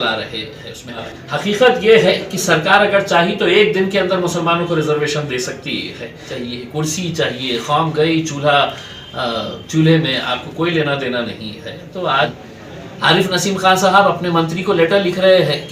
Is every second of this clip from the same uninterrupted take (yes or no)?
no